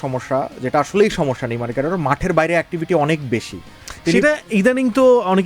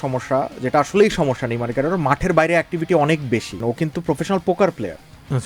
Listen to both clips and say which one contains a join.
second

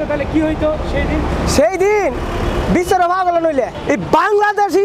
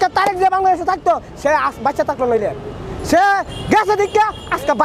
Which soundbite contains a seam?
first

